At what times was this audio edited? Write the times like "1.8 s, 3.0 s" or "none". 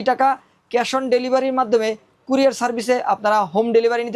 none